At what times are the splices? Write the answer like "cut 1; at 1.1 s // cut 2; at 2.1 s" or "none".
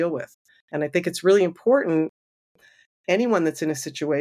none